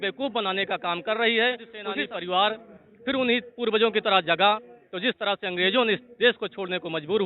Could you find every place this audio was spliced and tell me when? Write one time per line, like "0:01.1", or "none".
0:01.8